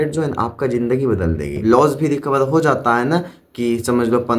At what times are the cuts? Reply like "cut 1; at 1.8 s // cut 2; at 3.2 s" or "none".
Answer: cut 1; at 1.6 s